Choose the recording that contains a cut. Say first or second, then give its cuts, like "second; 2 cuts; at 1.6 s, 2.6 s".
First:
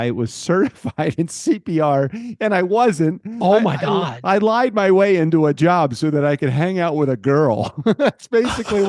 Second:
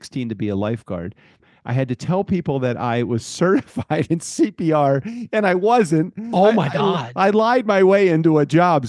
second; 1 cut; at 1.4 s